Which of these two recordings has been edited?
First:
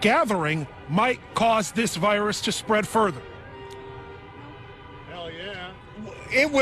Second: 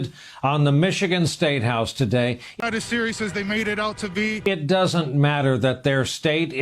second; 2 cuts; at 2.5 s, 4.4 s

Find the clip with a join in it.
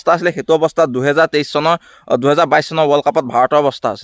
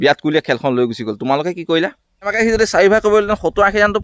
second; 1 cut; at 2.3 s

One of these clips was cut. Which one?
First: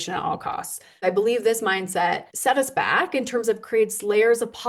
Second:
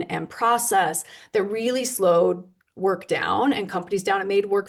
first; 2 cuts; at 1.0 s, 2.3 s

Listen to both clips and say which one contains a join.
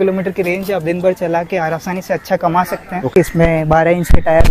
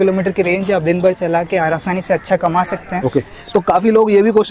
first; 1 cut; at 3.1 s

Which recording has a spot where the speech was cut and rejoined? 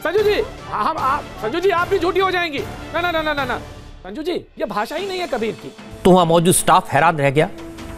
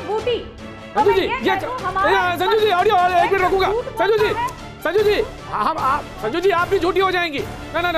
first; 1 cut; at 5.8 s

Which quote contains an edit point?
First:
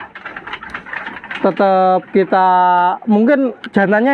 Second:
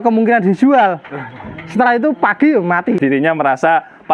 second; 1 cut; at 3.0 s

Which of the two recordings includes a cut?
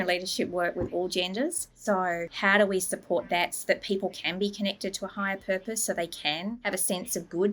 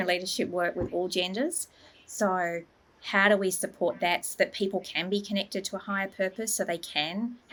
first; 2 cuts; at 2.0 s, 6.6 s

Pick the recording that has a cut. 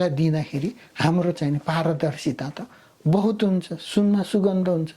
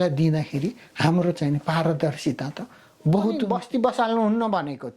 second; 1 cut; at 3.5 s

